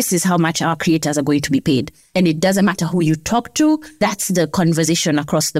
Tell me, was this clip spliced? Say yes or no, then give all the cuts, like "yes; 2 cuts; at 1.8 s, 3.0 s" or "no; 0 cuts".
yes; 2 cuts; at 2.1 s, 4.0 s